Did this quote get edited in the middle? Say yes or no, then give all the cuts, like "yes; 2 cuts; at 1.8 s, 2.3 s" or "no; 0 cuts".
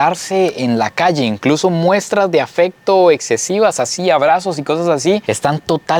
no; 0 cuts